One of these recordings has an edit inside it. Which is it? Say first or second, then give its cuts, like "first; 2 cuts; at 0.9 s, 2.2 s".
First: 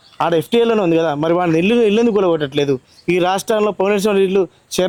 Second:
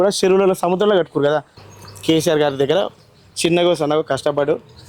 second; 1 cut; at 1.6 s